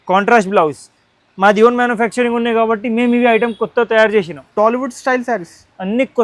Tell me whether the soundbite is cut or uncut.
uncut